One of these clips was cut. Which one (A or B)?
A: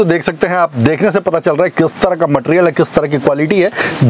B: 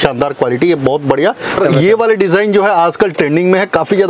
B